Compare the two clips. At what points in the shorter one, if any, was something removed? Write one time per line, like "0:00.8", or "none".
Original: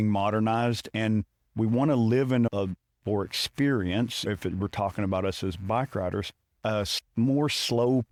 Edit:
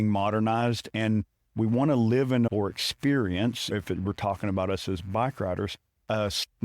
0:02.5